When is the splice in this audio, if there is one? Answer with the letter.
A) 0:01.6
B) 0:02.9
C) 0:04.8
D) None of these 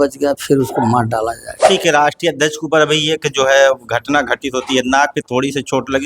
A